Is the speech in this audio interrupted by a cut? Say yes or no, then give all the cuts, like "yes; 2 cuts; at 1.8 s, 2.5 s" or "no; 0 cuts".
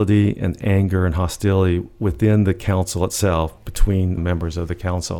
yes; 1 cut; at 4.2 s